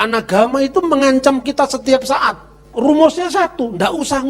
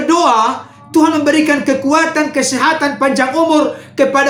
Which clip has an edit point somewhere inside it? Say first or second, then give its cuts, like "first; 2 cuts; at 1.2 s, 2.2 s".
first; 1 cut; at 2.7 s